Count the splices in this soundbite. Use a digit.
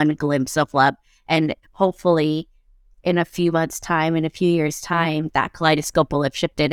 0